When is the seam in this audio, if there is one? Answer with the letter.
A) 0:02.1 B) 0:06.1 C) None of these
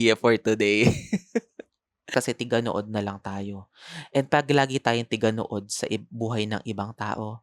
A